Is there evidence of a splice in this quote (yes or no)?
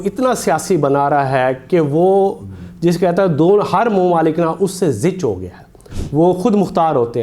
yes